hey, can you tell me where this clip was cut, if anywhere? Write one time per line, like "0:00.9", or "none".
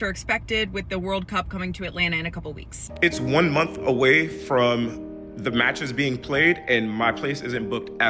0:02.8